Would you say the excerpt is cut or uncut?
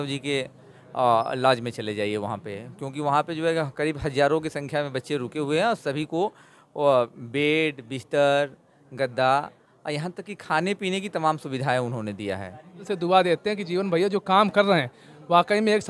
cut